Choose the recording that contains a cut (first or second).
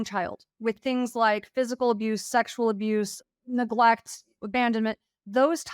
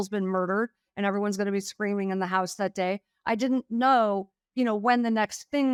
first